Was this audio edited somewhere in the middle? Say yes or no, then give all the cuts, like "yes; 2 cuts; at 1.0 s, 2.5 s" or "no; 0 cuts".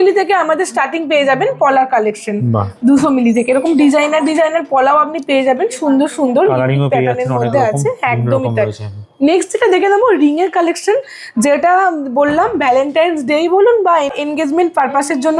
no; 0 cuts